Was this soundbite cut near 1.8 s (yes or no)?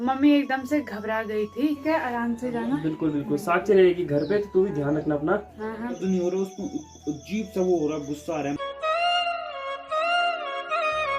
yes